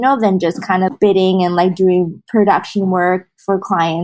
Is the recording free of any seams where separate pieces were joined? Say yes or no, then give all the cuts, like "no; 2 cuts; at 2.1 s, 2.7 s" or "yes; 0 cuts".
no; 2 cuts; at 0.9 s, 2.2 s